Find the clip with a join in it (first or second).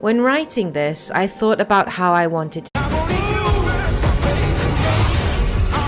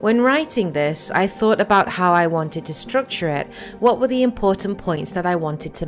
second